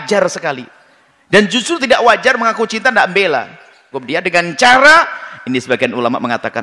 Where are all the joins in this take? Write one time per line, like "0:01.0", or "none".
0:03.9